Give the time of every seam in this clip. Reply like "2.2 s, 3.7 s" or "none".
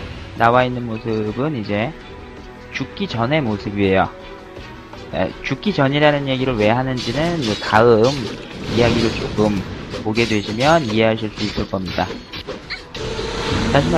8.5 s